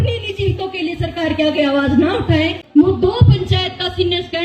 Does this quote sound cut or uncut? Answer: cut